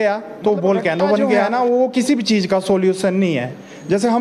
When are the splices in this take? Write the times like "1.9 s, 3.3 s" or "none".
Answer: 1.5 s